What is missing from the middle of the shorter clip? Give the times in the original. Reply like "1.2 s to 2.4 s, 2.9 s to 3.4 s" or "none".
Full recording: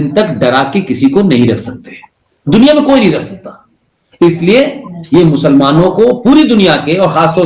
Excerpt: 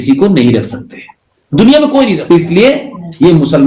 3.1 s to 4.1 s